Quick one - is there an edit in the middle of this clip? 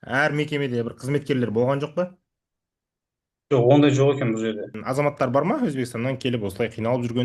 yes; 1 cut; at 4.7 s

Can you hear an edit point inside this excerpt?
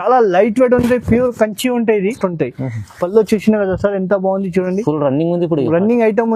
yes; 1 cut; at 2.2 s

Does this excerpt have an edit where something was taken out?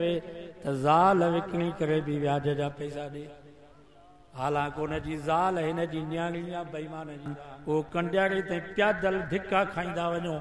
yes; 1 cut; at 7.4 s

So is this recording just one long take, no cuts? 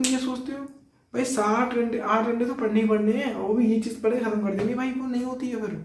yes; 0 cuts

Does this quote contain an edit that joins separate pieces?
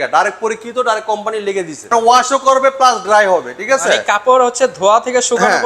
yes; 1 cut; at 1.9 s

